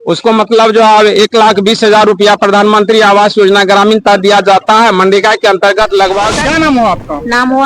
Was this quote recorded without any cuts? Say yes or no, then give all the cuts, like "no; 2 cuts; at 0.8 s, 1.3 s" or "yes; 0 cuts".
no; 1 cut; at 6.3 s